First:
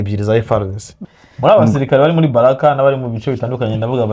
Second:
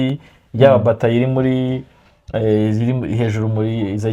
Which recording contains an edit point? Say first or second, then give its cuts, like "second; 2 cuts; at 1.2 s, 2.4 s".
first; 1 cut; at 1.0 s